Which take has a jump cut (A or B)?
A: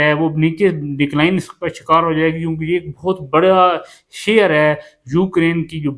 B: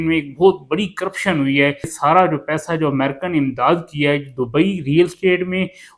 B